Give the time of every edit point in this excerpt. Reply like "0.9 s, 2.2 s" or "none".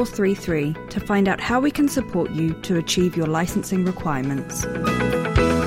4.6 s